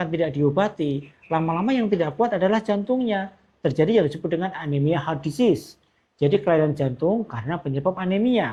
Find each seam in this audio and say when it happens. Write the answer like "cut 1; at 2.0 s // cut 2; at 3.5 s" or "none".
none